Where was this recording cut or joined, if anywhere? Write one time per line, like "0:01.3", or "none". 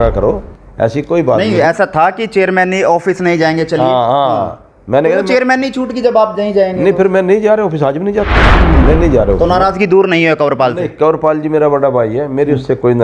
none